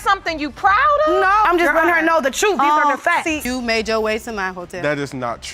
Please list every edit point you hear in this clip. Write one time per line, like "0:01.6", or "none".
0:03.4